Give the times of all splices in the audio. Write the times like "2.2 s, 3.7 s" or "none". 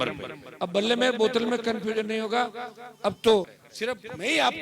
3.5 s